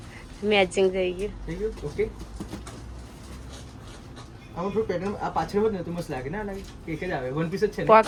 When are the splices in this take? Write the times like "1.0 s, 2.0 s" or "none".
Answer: none